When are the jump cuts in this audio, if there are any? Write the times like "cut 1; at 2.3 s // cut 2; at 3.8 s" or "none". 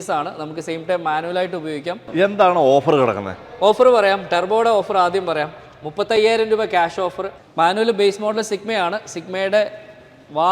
cut 1; at 2.0 s // cut 2; at 7.2 s